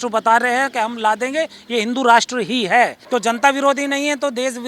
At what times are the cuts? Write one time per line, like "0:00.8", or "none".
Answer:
0:03.0